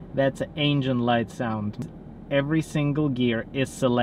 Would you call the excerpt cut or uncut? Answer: cut